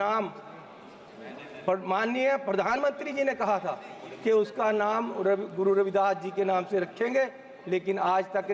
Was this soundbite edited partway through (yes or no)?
no